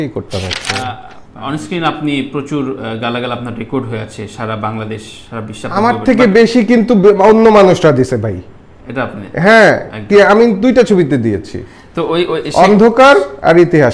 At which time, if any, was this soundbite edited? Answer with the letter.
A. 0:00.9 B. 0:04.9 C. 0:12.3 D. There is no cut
A